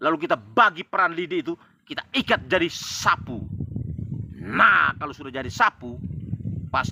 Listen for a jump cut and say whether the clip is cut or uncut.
uncut